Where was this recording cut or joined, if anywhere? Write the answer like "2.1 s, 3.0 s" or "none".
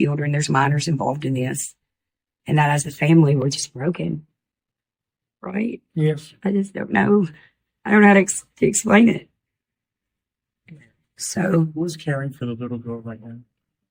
none